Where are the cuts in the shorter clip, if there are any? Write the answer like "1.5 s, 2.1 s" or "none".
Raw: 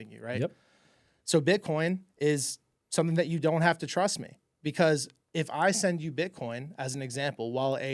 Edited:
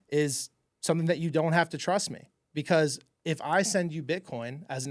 none